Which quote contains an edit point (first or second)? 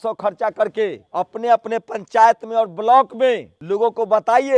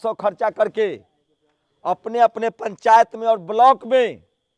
first